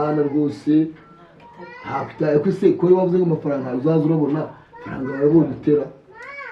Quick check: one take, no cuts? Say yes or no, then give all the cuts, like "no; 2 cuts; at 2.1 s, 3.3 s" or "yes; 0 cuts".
yes; 0 cuts